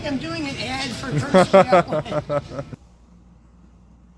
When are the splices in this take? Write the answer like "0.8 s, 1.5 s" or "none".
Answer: 2.7 s